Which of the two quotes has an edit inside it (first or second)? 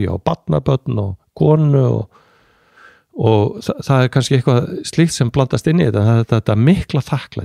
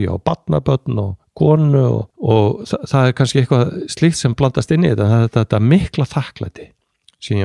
second